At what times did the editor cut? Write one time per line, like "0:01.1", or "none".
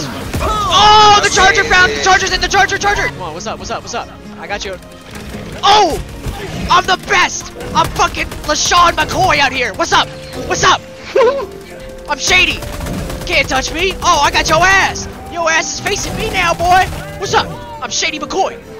0:03.1